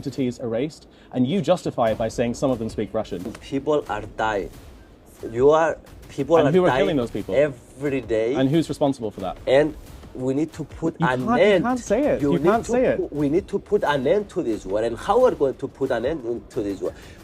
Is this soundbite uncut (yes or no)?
no